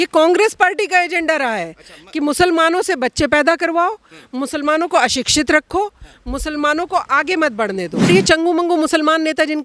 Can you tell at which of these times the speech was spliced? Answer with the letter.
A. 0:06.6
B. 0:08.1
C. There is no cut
B